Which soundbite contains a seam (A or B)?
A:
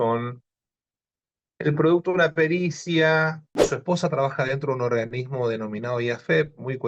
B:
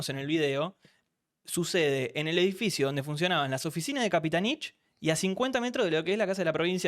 A